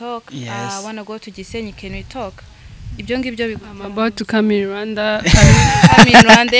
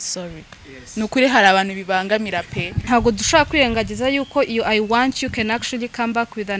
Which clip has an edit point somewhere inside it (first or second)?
second